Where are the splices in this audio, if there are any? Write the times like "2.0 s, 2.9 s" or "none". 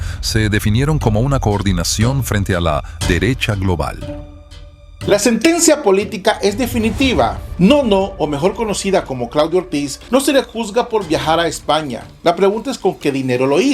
4.6 s